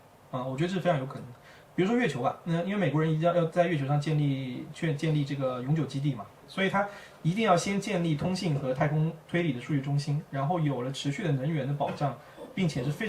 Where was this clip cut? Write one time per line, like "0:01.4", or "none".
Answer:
0:06.4